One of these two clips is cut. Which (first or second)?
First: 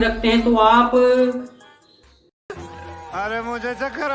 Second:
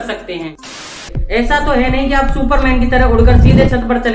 second